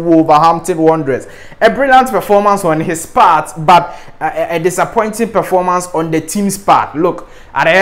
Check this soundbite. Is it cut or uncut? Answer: uncut